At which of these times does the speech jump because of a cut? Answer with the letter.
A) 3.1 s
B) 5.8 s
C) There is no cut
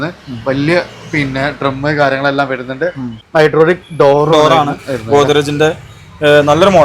A